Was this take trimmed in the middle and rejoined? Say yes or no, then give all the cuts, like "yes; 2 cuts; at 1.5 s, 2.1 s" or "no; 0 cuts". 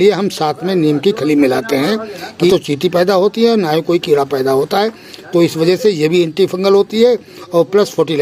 yes; 1 cut; at 2.5 s